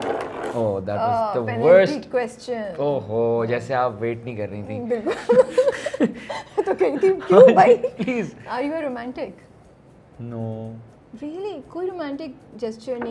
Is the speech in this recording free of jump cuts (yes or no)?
yes